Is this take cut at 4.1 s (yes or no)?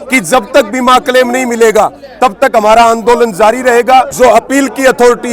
yes